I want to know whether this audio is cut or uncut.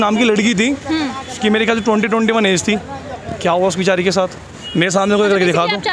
uncut